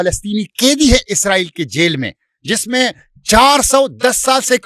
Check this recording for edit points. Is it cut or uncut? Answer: uncut